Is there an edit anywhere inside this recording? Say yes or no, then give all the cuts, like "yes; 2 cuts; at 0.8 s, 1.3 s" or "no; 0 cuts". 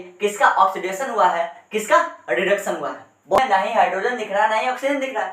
yes; 1 cut; at 3.4 s